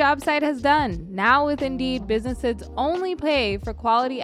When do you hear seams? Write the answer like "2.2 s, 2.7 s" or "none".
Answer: none